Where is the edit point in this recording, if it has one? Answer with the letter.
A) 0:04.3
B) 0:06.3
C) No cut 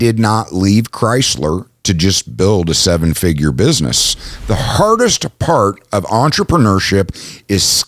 A